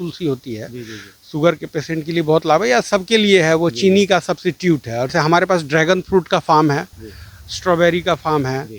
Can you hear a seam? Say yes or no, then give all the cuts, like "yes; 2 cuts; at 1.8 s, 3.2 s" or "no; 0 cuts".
yes; 1 cut; at 5.1 s